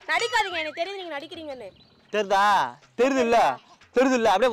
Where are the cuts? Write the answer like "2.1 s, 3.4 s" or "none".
none